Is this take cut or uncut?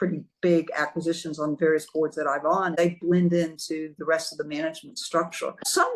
cut